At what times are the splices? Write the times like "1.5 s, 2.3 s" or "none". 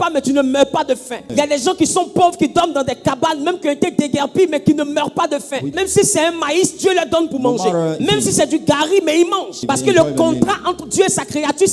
1.3 s, 5.7 s, 8.0 s, 9.6 s